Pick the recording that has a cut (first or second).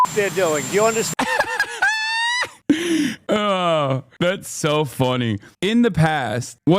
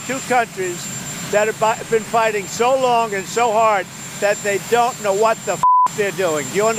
first